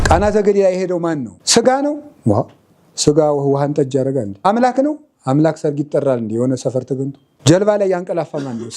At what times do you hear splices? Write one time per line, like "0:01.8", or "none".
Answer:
0:01.3
0:04.4
0:07.2